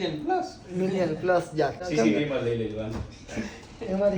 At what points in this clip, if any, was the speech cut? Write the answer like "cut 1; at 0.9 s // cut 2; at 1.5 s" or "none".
cut 1; at 1.8 s

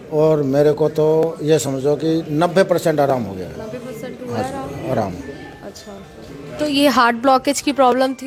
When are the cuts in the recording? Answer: none

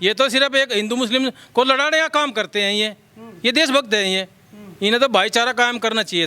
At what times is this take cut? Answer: none

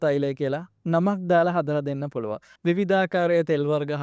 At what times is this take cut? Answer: cut 1; at 2.5 s

